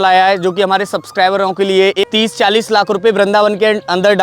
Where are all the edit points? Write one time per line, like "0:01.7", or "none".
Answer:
0:02.0